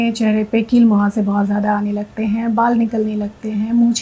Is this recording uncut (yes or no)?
yes